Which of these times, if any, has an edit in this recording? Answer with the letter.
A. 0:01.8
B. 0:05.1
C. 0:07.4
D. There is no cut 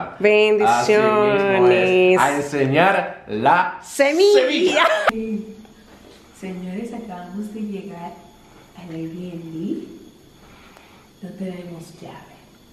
B